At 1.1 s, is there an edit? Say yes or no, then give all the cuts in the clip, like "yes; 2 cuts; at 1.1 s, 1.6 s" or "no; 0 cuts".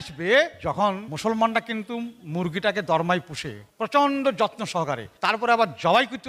yes; 1 cut; at 1.1 s